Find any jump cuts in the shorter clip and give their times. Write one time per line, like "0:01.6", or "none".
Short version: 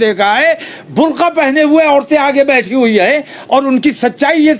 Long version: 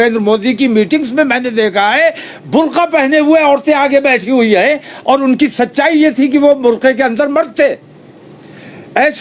none